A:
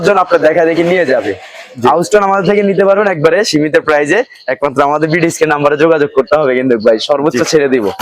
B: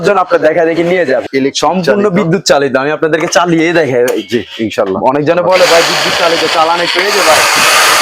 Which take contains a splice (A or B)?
B